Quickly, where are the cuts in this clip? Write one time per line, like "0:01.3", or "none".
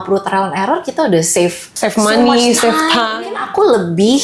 0:01.7
0:03.2